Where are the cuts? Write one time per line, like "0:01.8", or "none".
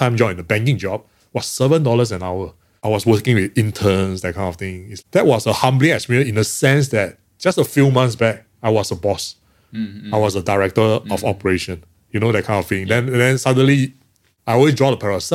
none